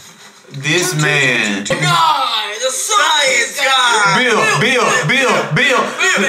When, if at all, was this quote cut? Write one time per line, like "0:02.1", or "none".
0:01.7